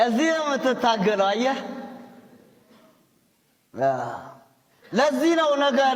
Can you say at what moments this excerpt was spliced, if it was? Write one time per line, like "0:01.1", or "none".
none